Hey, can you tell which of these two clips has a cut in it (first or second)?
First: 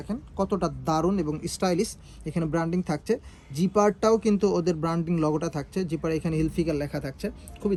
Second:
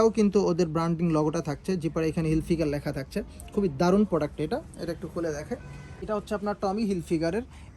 second